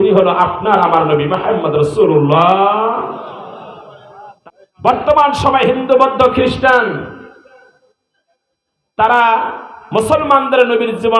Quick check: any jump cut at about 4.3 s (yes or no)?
yes